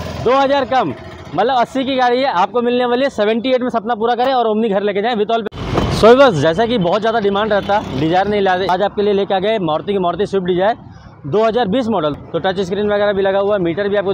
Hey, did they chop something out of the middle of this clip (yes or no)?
yes